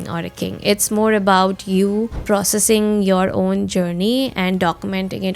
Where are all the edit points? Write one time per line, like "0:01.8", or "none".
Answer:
0:02.2